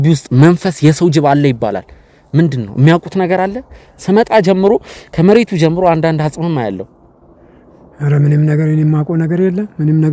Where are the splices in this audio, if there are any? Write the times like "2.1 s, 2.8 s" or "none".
none